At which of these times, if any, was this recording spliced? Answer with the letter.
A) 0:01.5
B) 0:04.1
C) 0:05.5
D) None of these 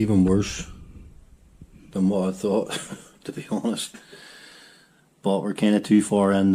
D